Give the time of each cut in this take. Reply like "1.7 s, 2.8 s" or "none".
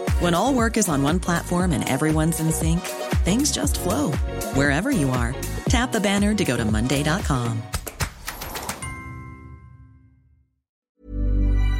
10.8 s